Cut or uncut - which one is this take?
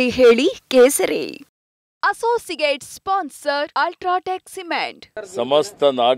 cut